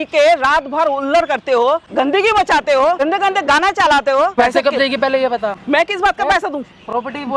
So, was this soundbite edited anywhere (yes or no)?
yes